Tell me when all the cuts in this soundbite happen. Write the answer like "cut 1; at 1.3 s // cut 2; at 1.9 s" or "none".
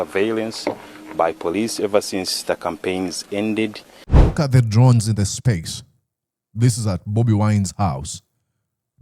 cut 1; at 4.1 s